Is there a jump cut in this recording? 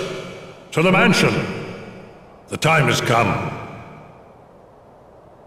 no; 0 cuts

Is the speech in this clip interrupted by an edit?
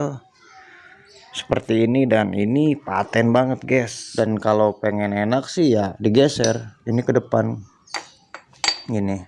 yes; 1 cut; at 4.0 s

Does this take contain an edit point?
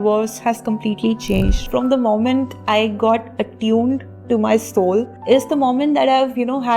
yes; 2 cuts; at 1.6 s, 5.1 s

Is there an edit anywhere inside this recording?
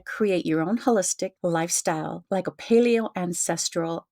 yes; 2 cuts; at 1.4 s, 2.2 s

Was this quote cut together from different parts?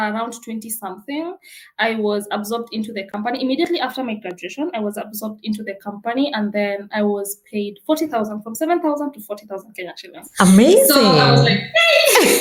no; 0 cuts

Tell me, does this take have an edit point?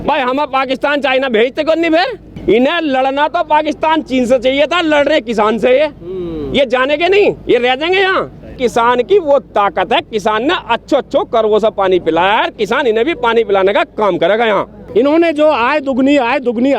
yes; 3 cuts; at 2.2 s, 8.5 s, 14.8 s

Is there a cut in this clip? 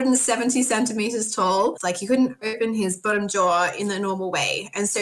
yes; 2 cuts; at 1.8 s, 3.0 s

